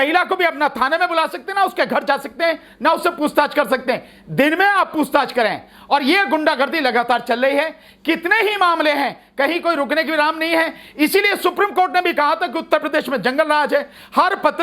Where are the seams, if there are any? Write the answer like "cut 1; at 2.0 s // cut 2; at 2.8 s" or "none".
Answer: none